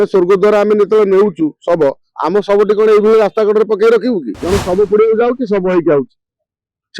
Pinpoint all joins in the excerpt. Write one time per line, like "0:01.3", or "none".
0:04.3